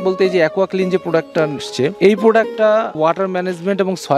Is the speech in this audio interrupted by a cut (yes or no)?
yes